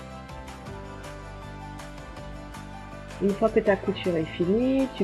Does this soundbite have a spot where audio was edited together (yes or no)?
no